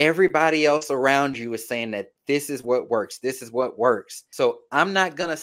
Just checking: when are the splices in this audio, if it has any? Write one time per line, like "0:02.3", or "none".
0:04.2